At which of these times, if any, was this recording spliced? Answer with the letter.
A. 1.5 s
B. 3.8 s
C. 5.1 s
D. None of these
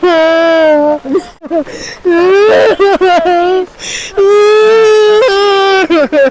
A